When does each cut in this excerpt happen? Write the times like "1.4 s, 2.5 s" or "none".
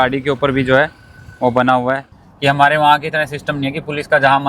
2.2 s

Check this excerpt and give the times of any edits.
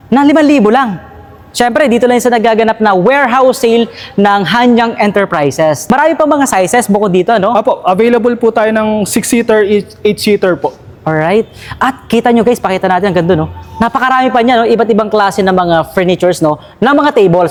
none

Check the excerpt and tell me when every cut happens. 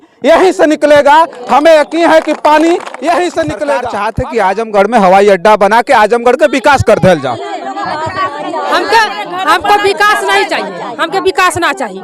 4.0 s

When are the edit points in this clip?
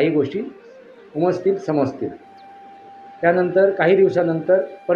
none

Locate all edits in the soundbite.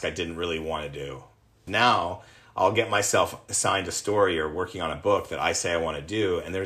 1.6 s

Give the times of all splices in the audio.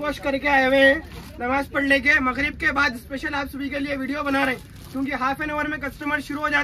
none

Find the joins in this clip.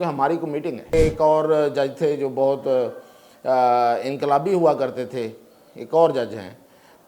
0.9 s

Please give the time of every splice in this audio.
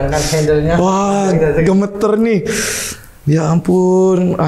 none

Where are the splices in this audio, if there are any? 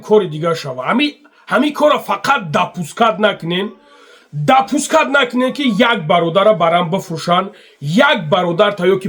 none

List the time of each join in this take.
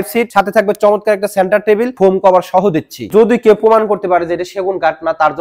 1.9 s, 3.1 s

